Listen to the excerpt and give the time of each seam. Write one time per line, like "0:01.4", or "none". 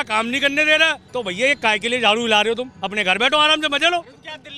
0:01.0